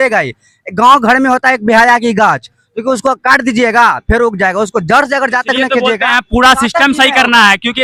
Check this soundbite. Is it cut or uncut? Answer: uncut